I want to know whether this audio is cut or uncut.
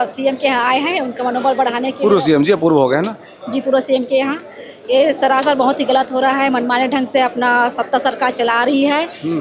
uncut